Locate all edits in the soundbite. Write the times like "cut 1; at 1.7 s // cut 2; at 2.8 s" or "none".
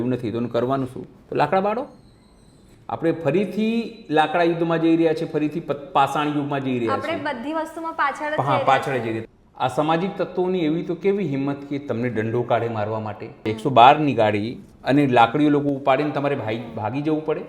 cut 1; at 9.2 s // cut 2; at 13.4 s